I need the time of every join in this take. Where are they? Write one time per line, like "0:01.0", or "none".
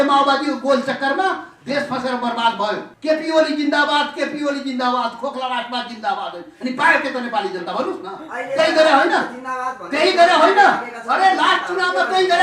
0:02.9